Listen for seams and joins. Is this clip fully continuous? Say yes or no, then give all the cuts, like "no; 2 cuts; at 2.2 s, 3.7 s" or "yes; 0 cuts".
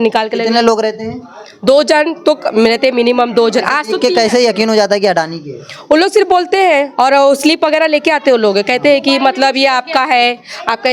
yes; 0 cuts